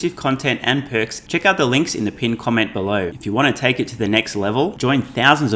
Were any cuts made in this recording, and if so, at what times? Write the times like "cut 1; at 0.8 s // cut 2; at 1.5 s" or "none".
cut 1; at 1.2 s // cut 2; at 3.1 s